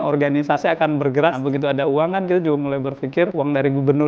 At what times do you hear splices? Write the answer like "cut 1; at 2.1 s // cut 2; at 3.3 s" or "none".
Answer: cut 1; at 1.3 s // cut 2; at 3.3 s